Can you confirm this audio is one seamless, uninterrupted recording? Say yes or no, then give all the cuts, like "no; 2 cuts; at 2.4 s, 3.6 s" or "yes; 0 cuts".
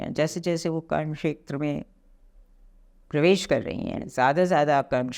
yes; 0 cuts